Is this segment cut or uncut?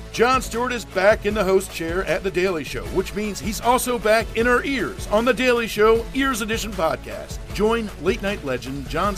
uncut